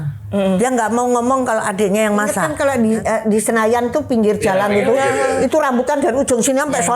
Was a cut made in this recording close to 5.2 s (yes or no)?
no